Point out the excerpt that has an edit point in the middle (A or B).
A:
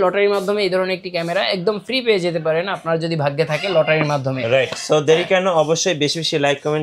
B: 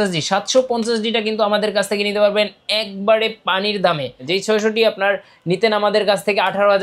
B